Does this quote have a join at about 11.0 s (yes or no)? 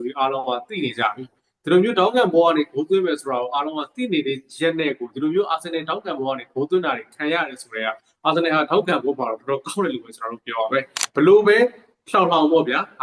yes